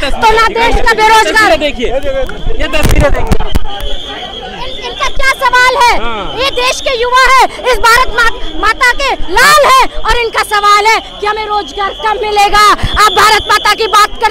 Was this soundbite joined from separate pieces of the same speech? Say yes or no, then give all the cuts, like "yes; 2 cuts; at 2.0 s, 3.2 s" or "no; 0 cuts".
no; 0 cuts